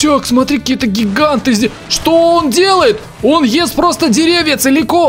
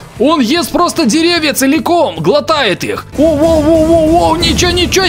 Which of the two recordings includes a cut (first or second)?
second